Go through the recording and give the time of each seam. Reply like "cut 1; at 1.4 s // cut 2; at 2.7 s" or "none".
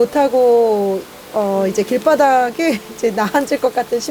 none